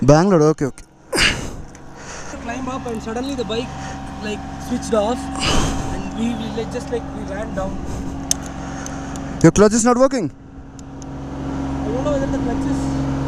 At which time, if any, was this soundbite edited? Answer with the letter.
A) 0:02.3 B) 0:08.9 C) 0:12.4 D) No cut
A